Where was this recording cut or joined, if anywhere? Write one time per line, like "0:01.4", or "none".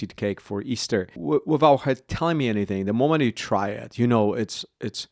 0:01.1